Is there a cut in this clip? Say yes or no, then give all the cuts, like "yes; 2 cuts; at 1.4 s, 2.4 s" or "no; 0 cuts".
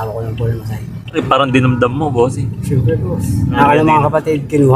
no; 0 cuts